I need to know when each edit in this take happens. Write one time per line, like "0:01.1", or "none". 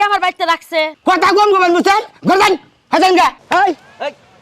0:03.4